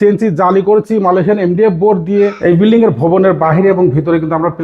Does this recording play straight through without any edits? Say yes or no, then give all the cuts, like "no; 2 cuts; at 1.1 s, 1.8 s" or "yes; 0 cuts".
no; 1 cut; at 2.4 s